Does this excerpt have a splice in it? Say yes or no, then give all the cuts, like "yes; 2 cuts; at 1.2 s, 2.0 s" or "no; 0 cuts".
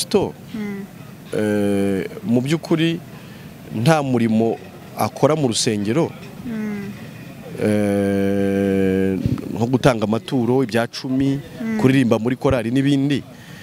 no; 0 cuts